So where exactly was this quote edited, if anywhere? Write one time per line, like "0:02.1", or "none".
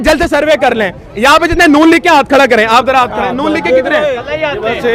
none